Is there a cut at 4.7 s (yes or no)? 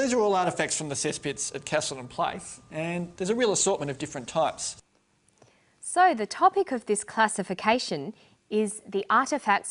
no